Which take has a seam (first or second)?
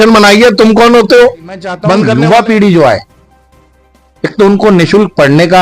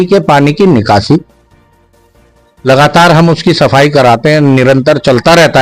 first